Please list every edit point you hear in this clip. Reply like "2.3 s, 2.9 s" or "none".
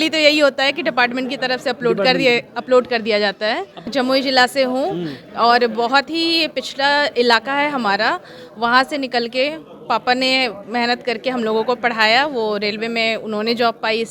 3.9 s